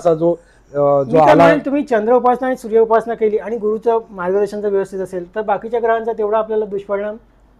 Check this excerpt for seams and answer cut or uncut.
uncut